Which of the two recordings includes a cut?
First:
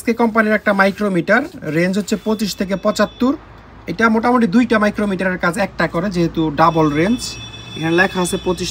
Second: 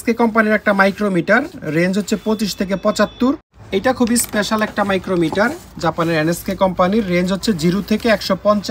second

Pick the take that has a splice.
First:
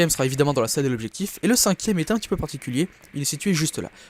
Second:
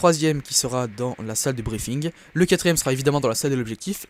first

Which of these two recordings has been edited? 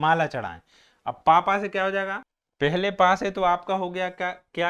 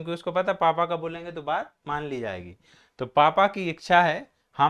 first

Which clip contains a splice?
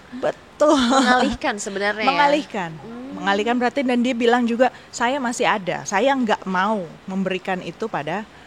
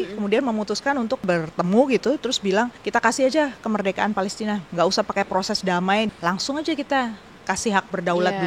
second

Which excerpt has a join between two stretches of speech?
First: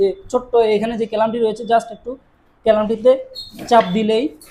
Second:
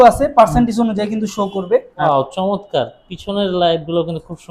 second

